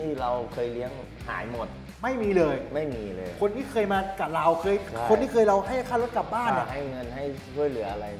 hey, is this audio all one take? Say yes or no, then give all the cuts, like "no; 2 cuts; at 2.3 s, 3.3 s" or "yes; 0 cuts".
yes; 0 cuts